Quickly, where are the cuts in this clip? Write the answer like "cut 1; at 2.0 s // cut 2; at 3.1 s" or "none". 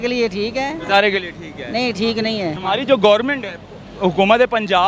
cut 1; at 2.6 s